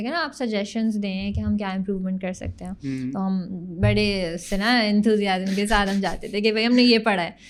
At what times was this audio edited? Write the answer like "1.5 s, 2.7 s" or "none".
none